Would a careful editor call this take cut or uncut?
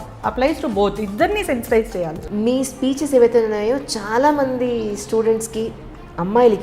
cut